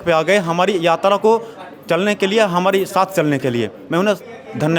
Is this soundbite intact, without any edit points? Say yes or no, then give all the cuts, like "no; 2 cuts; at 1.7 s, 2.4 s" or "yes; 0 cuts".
yes; 0 cuts